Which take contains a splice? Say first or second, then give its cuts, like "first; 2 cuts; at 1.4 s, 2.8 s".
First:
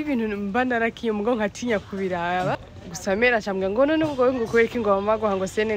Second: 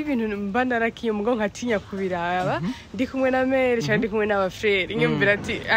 first; 1 cut; at 2.6 s